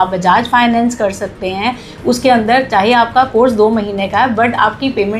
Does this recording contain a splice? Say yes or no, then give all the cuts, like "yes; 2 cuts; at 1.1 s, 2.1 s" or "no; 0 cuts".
no; 0 cuts